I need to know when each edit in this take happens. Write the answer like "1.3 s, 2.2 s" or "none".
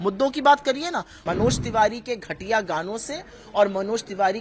1.2 s